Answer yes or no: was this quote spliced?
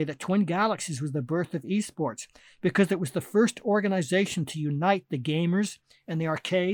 no